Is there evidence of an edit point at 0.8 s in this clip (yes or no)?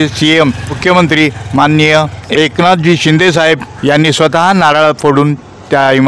yes